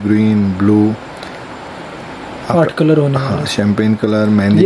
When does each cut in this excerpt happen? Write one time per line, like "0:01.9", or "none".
none